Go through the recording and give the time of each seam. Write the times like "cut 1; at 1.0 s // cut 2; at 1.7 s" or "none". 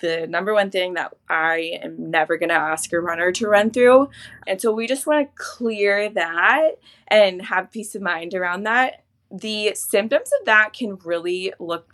none

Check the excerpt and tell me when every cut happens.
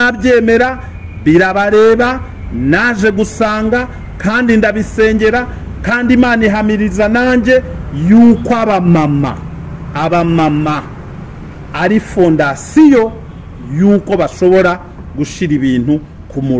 none

